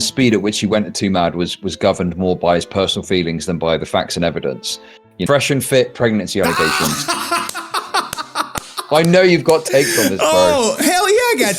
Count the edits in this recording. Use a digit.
1